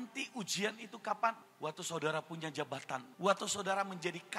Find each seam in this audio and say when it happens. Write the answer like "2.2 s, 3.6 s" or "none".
1.5 s, 3.1 s